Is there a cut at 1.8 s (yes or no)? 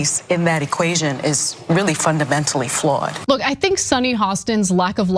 no